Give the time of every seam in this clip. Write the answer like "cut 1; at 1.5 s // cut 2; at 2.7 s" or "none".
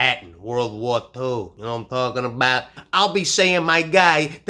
cut 1; at 2.8 s